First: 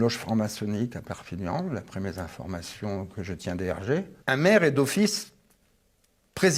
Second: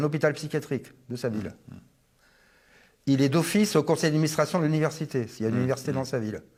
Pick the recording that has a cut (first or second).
first